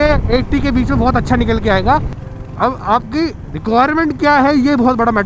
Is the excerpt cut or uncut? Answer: cut